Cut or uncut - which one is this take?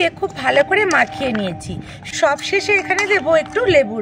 uncut